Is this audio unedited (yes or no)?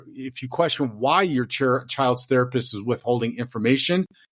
yes